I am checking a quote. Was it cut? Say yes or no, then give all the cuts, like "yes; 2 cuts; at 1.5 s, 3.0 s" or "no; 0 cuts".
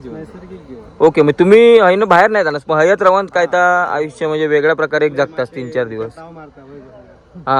no; 0 cuts